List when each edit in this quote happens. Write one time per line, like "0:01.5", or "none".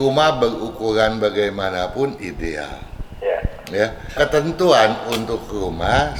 none